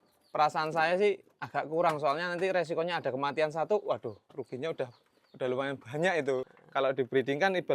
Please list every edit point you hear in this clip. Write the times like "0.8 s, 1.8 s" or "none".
6.5 s

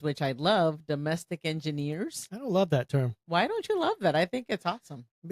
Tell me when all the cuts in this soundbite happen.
none

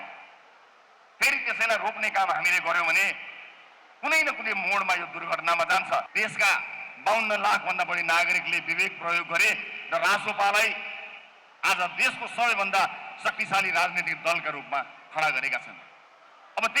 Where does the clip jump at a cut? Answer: 6.2 s

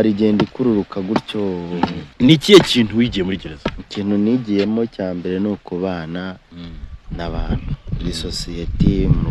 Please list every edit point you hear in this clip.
2.0 s

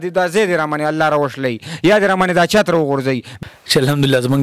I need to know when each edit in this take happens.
3.3 s

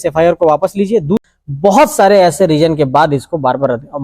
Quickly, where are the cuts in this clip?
1.2 s

